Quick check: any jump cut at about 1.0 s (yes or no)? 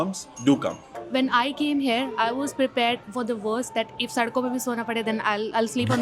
yes